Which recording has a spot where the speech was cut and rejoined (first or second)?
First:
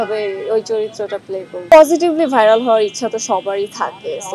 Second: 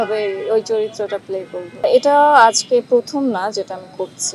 first